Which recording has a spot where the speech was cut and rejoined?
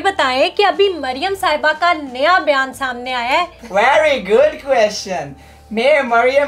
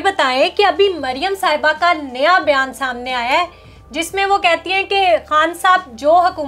first; 1 cut; at 3.6 s

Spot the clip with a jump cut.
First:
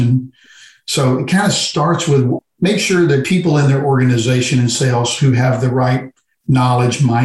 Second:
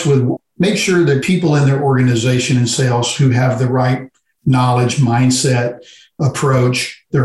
second; 1 cut; at 6.2 s

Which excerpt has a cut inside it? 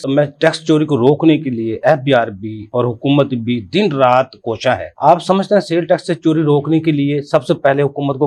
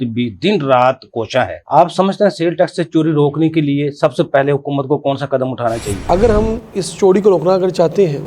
second; 1 cut; at 6.0 s

